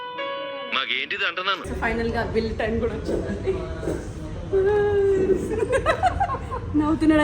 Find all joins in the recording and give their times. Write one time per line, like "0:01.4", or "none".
0:01.7